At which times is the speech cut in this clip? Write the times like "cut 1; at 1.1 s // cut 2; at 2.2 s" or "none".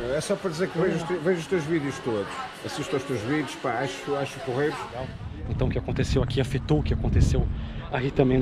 cut 1; at 5.2 s